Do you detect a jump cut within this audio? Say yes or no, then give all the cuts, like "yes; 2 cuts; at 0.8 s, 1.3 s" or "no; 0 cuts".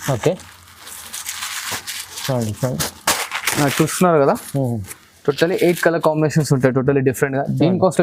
no; 0 cuts